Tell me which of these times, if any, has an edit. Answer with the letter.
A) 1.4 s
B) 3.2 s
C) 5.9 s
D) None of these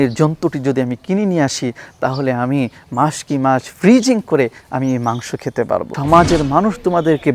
C